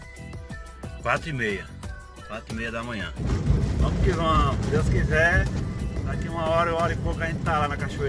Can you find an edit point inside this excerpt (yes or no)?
yes